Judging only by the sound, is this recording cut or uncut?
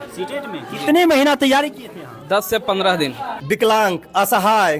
cut